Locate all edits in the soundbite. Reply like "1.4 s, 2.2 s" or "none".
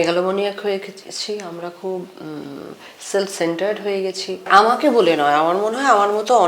4.5 s